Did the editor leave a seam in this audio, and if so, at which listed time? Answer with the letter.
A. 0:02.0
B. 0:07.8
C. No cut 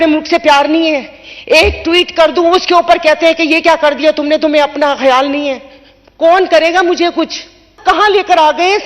B